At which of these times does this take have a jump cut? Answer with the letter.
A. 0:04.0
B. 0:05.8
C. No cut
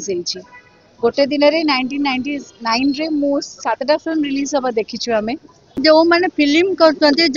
B